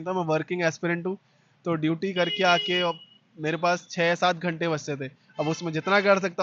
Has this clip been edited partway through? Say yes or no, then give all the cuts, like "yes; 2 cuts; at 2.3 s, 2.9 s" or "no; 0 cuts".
no; 0 cuts